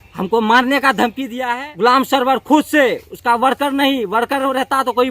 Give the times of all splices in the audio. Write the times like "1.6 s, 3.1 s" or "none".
1.3 s